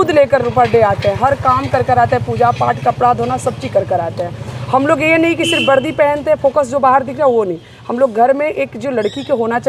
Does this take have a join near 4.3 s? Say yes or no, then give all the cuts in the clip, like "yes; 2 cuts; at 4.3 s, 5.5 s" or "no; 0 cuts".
no; 0 cuts